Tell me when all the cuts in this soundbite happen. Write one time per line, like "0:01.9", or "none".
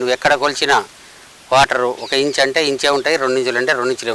none